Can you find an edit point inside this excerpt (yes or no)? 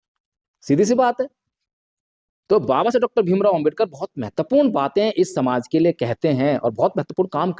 no